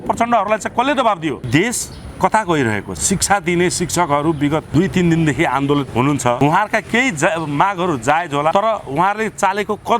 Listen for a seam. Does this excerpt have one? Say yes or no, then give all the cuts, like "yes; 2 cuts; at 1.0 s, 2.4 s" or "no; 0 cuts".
yes; 5 cuts; at 1.5 s, 2.9 s, 4.7 s, 6.1 s, 8.5 s